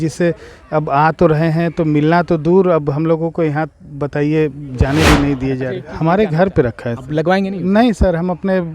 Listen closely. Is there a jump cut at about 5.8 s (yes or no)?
yes